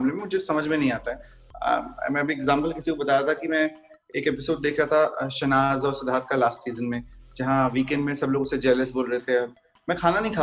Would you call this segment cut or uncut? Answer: uncut